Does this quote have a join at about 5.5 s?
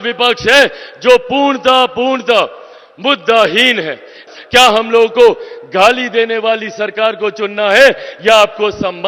no; 1 cut; at 4.2 s

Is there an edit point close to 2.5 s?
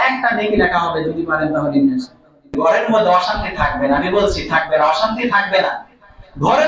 yes; 1 cut; at 2.5 s

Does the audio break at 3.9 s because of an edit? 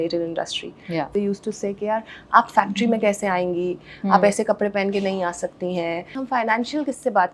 no; 2 cuts; at 1.1 s, 6.2 s

